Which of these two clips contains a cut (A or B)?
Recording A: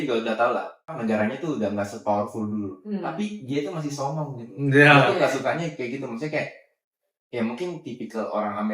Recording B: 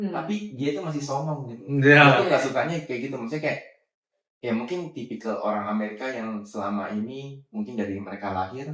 A